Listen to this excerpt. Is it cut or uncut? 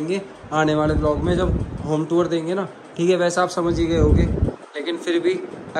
uncut